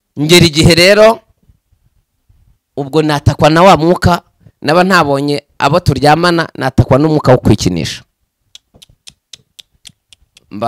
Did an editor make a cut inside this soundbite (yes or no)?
no